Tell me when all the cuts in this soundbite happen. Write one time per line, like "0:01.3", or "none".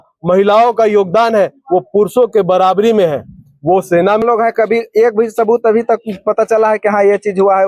0:04.2